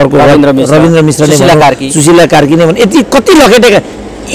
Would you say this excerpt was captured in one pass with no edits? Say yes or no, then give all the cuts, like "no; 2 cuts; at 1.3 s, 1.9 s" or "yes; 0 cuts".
yes; 0 cuts